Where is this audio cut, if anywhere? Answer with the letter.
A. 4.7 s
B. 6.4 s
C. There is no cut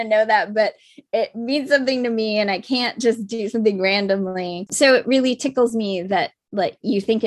A